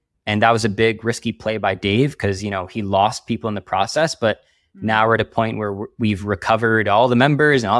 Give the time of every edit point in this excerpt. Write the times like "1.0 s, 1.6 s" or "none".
none